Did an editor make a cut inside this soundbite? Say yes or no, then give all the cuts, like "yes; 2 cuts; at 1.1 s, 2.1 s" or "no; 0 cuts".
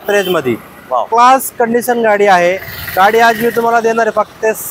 no; 0 cuts